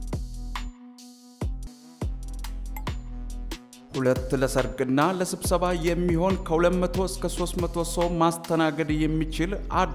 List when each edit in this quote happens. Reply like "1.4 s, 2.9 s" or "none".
1.7 s